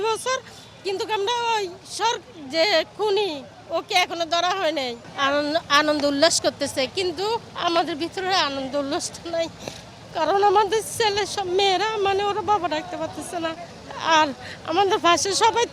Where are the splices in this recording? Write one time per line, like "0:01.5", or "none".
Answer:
0:05.0